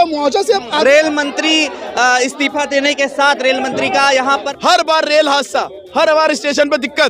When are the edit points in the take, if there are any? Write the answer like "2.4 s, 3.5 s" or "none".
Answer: 0.8 s, 4.5 s